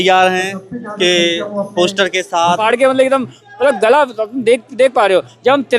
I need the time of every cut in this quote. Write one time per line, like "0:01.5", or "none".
0:02.6